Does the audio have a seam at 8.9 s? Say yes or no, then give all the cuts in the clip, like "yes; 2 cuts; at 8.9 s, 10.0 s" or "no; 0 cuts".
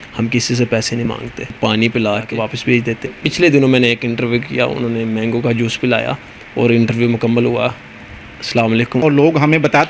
yes; 3 cuts; at 1.5 s, 3.2 s, 8.9 s